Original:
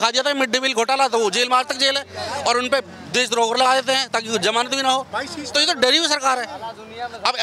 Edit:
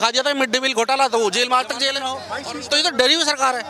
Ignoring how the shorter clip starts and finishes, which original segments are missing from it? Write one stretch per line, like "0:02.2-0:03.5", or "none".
0:02.2-0:05.0